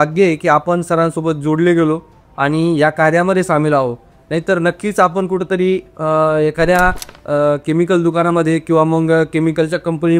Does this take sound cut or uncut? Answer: uncut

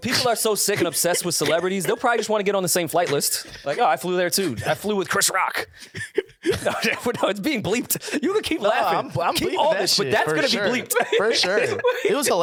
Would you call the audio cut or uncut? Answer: uncut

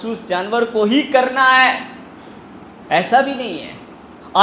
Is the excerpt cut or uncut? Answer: uncut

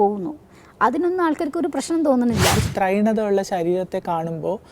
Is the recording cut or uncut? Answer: cut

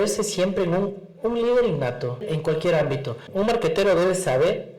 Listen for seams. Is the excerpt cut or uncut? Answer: cut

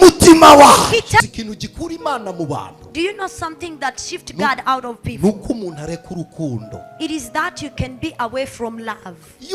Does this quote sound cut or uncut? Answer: cut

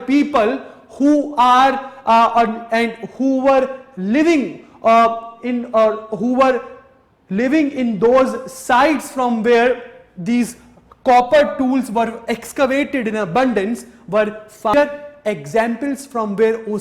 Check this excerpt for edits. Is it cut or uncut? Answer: cut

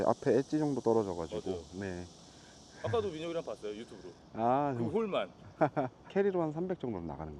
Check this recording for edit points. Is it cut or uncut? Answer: uncut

